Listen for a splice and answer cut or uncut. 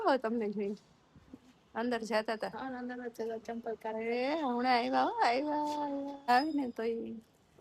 cut